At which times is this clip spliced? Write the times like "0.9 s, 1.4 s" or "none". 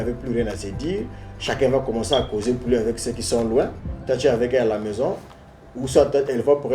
none